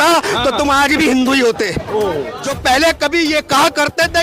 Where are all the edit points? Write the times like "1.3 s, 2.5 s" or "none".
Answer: 2.4 s